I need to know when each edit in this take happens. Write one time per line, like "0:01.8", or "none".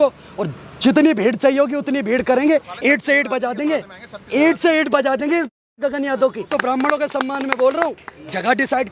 0:06.4